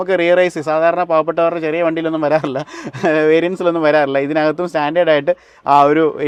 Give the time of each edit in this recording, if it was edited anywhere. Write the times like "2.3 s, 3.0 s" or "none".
none